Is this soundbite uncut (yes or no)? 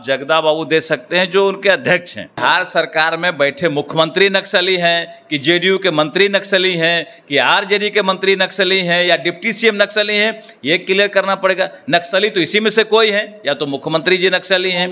no